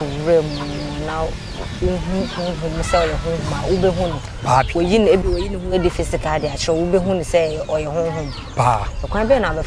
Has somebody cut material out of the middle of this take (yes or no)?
no